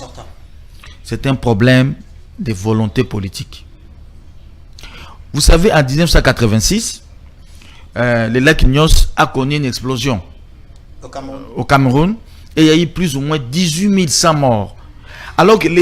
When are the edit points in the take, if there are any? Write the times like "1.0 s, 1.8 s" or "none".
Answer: none